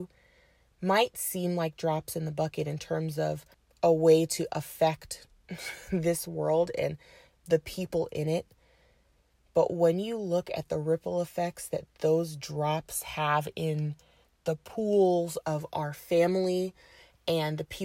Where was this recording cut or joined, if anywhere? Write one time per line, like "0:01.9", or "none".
none